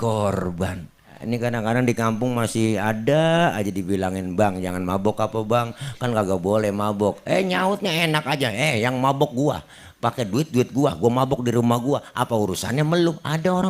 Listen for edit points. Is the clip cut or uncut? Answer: cut